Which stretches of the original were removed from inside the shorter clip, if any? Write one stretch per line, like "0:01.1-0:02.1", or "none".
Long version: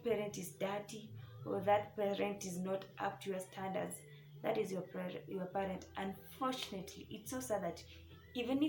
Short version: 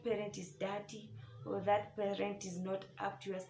none

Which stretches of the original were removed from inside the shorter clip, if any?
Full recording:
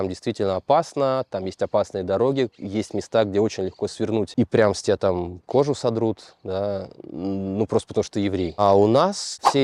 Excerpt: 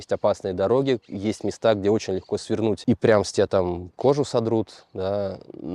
none

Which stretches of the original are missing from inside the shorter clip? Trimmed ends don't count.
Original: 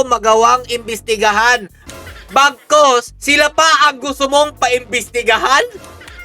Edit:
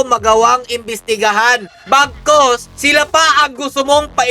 0:01.7-0:02.2

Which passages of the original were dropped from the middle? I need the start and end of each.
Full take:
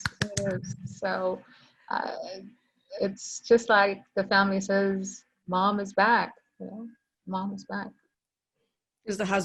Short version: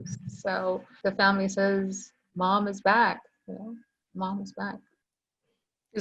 0:01.5-0:04.0

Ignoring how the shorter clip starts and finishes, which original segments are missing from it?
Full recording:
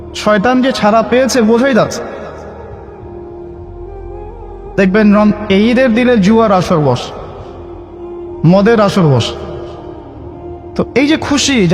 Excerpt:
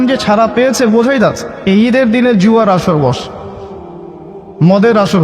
0:02.1-0:05.4

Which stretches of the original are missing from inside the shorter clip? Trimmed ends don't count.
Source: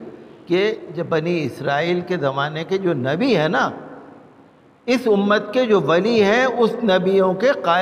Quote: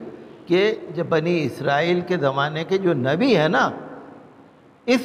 none

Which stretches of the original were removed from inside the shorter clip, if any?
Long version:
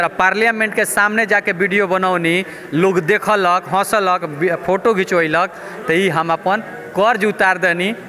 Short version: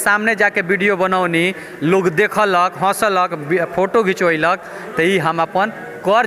none

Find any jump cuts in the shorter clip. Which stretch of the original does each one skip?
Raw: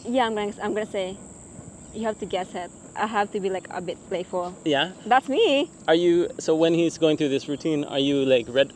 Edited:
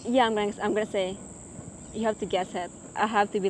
none

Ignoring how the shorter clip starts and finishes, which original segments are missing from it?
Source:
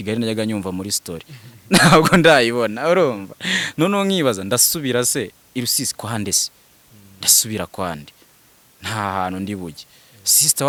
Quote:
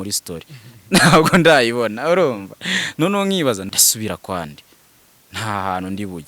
0:04.4-0:07.1

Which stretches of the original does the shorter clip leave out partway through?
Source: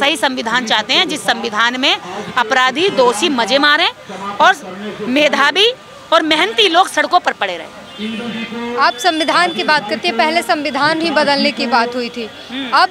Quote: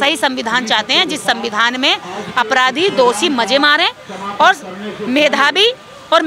none

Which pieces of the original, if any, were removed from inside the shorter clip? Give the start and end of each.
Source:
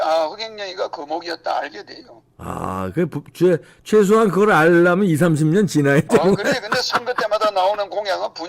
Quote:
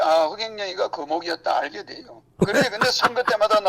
0:02.4-0:06.3

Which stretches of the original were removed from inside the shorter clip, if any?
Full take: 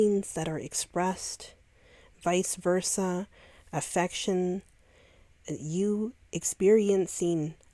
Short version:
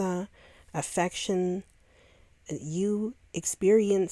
none

